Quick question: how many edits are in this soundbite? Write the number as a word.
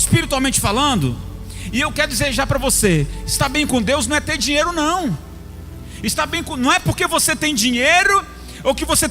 zero